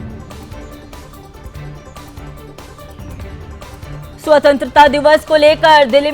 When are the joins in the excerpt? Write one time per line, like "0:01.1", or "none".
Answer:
0:01.1

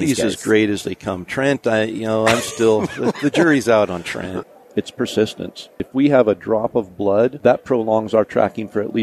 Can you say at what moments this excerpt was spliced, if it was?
0:04.4
0:05.8
0:07.4

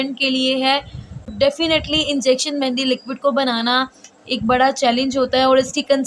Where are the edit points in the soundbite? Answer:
0:01.2

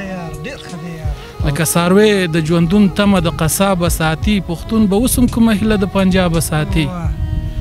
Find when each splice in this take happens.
0:01.3

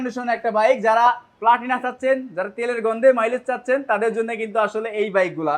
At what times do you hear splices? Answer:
none

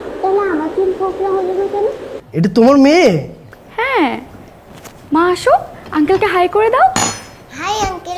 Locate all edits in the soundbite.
0:02.1

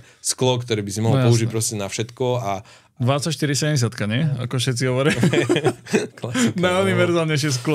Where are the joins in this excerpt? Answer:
none

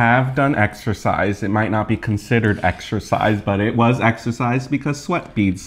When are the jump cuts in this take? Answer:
none

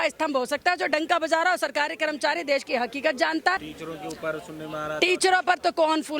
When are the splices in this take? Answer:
0:03.7

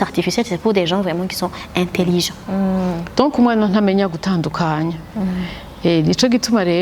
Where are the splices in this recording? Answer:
0:02.4

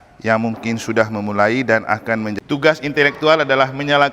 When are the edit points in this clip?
0:02.4

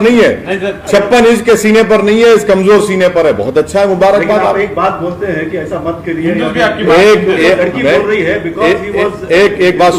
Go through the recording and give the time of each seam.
none

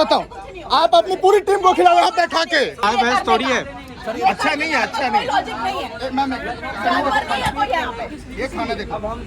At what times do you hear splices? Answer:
0:02.8

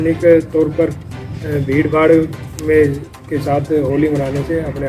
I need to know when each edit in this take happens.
none

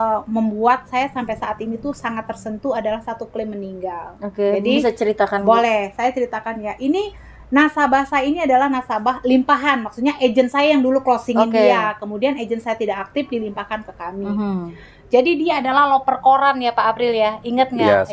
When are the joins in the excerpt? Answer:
none

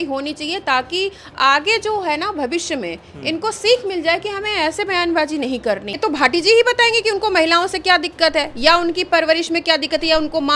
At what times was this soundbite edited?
0:06.0

